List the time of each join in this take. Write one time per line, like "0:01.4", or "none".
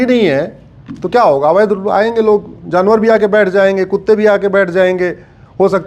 none